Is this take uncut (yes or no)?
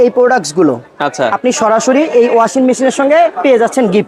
yes